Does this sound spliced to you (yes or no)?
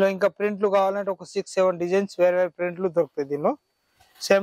no